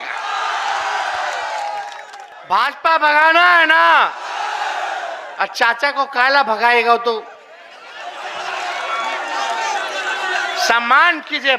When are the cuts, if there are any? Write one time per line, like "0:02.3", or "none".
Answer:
0:02.2